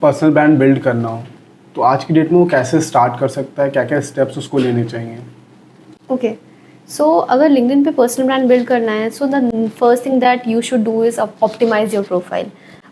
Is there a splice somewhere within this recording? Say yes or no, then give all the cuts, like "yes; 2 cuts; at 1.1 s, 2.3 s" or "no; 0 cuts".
no; 0 cuts